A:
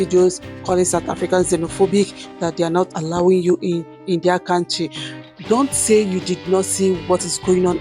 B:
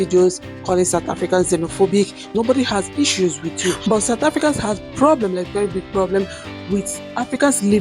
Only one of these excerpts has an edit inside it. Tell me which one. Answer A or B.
B